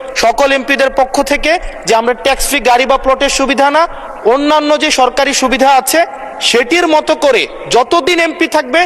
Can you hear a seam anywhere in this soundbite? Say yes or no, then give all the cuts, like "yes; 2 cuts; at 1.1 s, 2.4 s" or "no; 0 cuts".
no; 0 cuts